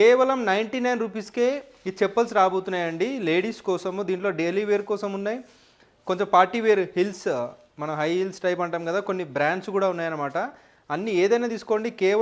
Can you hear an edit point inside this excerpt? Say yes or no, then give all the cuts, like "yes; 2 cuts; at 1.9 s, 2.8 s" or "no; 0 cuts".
no; 0 cuts